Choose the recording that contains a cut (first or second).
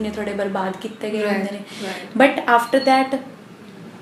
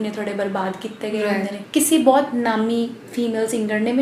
second